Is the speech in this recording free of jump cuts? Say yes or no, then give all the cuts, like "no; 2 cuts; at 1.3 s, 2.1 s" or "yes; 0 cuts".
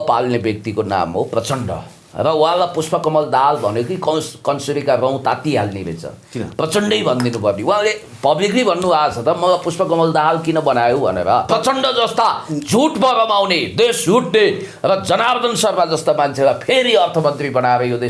no; 1 cut; at 11.5 s